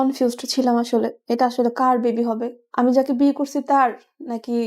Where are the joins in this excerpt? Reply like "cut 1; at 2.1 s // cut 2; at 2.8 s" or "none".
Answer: cut 1; at 1.2 s // cut 2; at 2.6 s

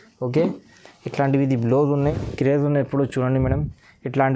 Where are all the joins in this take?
cut 1; at 2.0 s

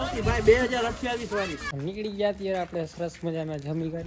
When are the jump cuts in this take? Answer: cut 1; at 1.7 s

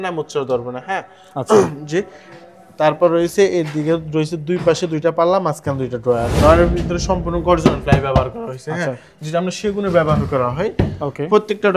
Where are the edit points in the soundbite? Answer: cut 1; at 6.4 s

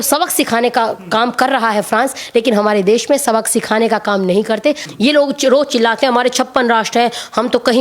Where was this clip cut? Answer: cut 1; at 4.9 s

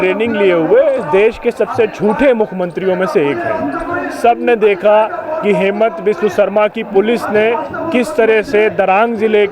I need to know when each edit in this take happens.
none

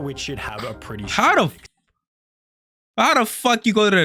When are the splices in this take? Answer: cut 1; at 2.8 s

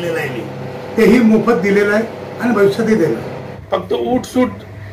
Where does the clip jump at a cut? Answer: cut 1; at 3.5 s

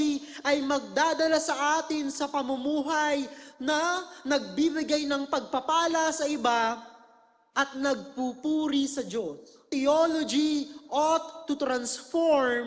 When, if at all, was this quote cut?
cut 1; at 9.6 s

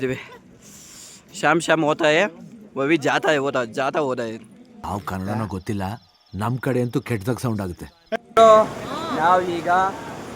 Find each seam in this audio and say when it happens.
cut 1; at 8.4 s

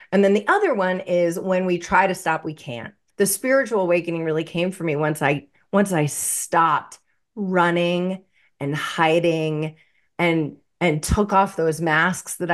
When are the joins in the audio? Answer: cut 1; at 3.0 s

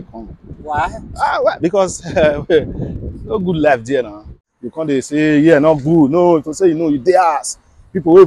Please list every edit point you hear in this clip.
cut 1; at 4.4 s

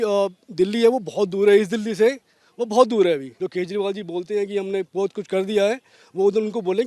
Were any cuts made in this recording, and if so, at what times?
cut 1; at 3.3 s

